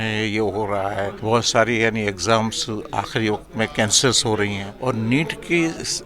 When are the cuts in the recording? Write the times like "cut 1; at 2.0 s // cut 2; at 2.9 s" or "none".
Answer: cut 1; at 1.2 s // cut 2; at 4.7 s